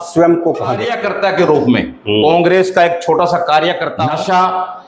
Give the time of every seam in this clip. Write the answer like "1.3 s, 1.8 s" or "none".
1.0 s, 3.9 s